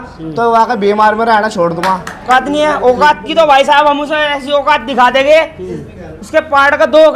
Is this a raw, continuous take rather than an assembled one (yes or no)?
no